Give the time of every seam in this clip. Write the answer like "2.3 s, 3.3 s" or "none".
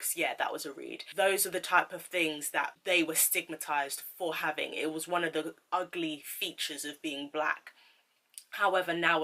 1.0 s, 2.7 s